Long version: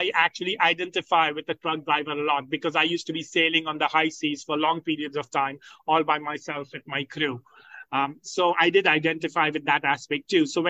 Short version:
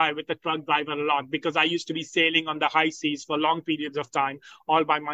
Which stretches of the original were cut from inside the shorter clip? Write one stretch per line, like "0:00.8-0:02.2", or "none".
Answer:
none